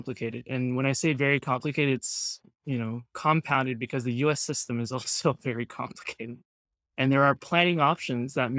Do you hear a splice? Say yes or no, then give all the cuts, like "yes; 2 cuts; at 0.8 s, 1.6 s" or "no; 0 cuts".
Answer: no; 0 cuts